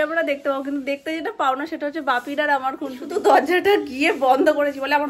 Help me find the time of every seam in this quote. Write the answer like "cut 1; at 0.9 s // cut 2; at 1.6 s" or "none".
cut 1; at 3.0 s